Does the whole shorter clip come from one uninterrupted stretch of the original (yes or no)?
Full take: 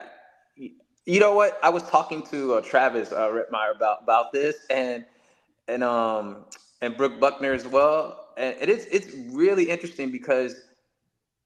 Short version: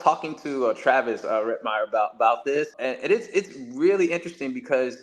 no